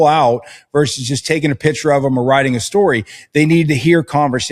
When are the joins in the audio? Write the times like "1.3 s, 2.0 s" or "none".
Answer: none

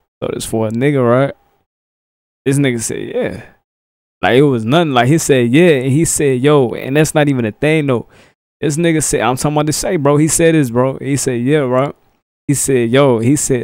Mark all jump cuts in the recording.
12.5 s

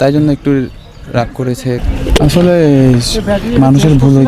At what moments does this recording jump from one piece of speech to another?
1.8 s

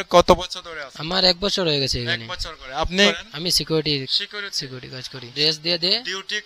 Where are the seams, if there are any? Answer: 3.2 s, 5.3 s

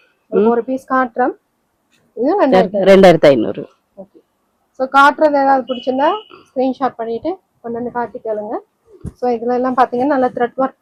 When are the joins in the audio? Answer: none

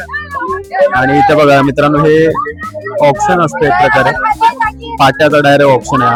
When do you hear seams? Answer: none

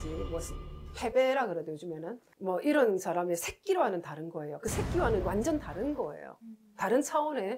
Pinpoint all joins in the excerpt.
none

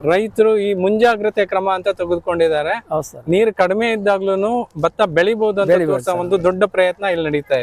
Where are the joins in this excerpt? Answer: none

